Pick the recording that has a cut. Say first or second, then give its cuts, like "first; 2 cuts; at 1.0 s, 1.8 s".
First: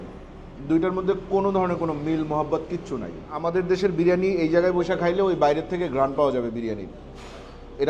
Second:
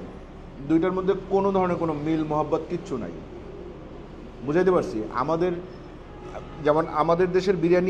first; 1 cut; at 3.4 s